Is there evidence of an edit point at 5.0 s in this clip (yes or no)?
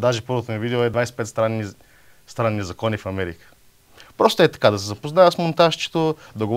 no